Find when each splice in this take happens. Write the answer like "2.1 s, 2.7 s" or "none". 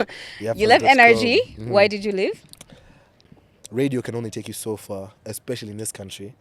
3.2 s